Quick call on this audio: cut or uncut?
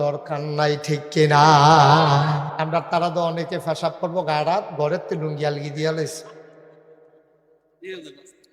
cut